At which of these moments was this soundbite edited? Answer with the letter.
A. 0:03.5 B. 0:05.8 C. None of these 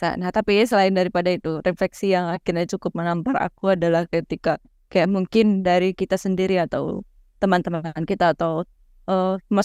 C